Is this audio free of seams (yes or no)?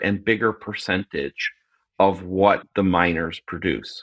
no